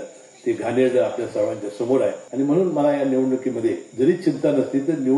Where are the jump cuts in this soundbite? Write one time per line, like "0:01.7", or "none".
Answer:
0:02.2
0:03.9